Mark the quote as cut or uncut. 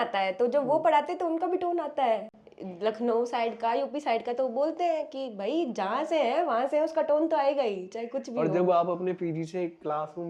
uncut